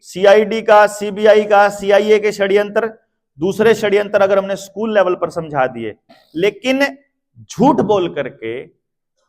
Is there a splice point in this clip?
yes; 1 cut; at 6.2 s

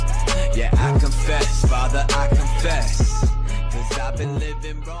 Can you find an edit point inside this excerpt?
no; 0 cuts

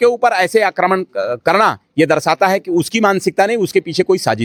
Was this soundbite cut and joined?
no; 0 cuts

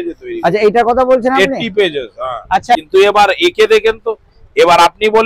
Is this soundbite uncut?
no; 1 cut; at 2.7 s

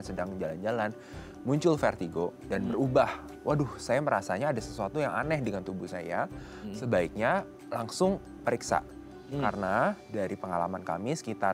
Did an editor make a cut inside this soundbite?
no; 0 cuts

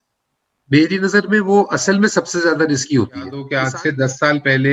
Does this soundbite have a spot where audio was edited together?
yes; 1 cut; at 3.5 s

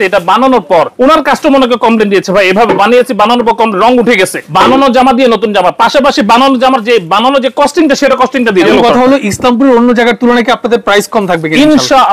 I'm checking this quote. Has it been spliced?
yes; 3 cuts; at 0.9 s, 4.4 s, 8.7 s

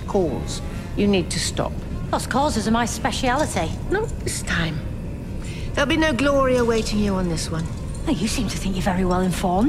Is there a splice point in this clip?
no; 0 cuts

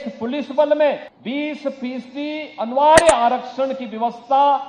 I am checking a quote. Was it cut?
yes; 1 cut; at 1.1 s

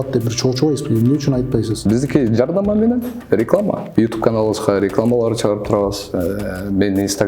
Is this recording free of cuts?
no; 2 cuts; at 1.8 s, 3.8 s

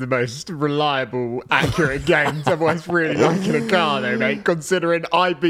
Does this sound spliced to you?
no; 0 cuts

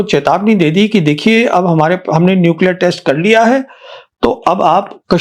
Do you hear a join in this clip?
no; 0 cuts

